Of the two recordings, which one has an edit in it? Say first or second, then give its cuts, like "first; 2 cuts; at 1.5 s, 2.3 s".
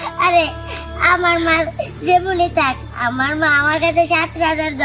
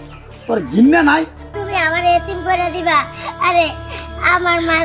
second; 1 cut; at 1.5 s